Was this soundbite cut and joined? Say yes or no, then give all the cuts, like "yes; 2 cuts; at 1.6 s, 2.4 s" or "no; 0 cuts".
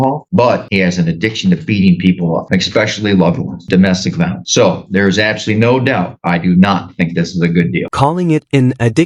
no; 0 cuts